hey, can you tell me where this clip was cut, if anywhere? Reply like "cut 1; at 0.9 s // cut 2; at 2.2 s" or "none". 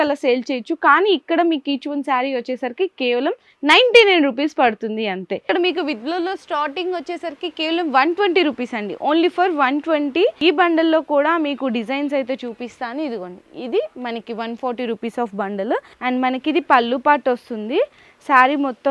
cut 1; at 5.5 s // cut 2; at 10.4 s // cut 3; at 15.9 s